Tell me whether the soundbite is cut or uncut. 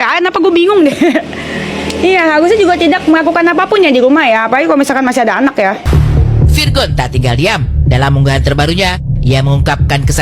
cut